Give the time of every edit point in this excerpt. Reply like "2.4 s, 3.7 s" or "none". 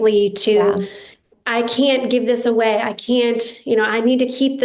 1.2 s